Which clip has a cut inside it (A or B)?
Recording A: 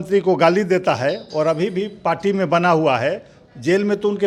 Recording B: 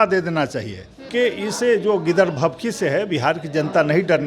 B